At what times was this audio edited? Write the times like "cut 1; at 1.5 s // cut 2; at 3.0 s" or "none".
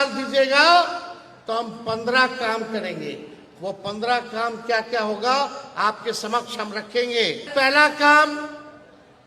cut 1; at 7.5 s